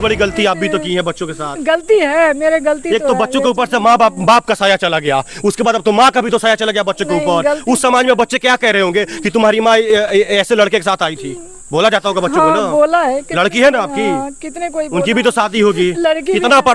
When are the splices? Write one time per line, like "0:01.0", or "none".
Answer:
none